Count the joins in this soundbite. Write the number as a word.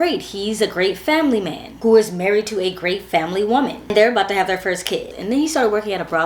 zero